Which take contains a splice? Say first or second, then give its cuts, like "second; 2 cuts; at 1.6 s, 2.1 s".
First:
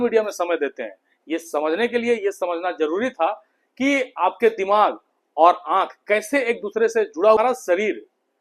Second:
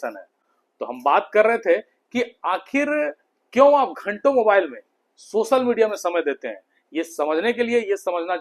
first; 1 cut; at 7.4 s